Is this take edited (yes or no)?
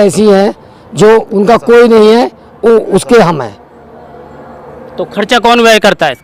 no